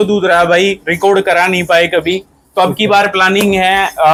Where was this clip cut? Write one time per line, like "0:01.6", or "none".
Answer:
none

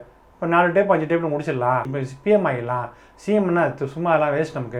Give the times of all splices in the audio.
none

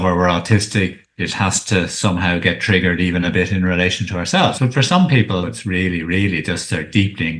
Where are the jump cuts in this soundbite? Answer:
0:04.6
0:05.4

